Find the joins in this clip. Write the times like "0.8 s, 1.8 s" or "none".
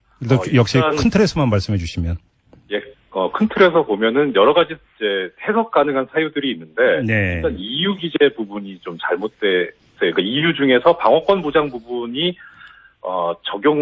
none